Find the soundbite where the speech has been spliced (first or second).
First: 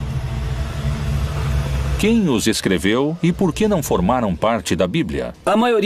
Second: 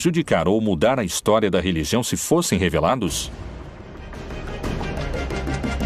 first